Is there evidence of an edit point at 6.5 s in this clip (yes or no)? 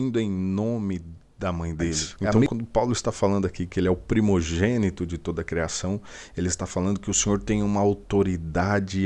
no